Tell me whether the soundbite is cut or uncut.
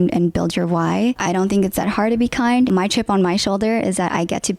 cut